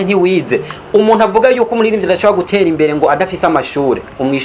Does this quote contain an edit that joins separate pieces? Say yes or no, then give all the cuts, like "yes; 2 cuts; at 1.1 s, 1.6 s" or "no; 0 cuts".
no; 0 cuts